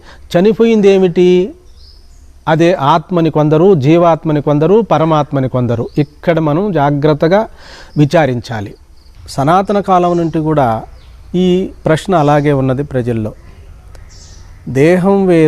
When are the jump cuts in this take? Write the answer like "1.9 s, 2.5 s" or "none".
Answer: 9.1 s